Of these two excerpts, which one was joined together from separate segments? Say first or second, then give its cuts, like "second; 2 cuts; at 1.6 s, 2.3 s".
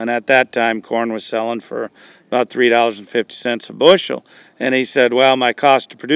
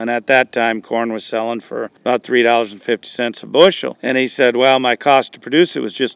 second; 2 cuts; at 1.9 s, 3.9 s